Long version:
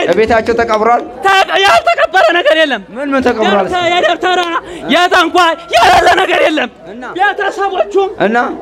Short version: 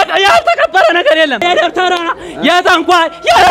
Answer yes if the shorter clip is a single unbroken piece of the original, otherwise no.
no